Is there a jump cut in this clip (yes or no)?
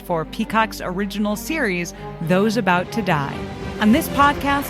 yes